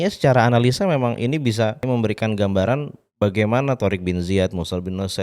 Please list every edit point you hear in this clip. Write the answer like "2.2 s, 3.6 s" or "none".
1.8 s